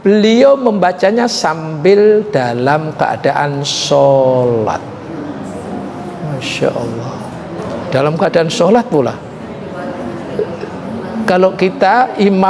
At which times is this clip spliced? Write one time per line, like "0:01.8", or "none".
0:07.7